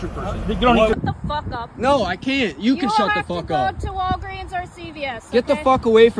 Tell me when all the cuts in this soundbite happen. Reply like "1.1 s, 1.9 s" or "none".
0.9 s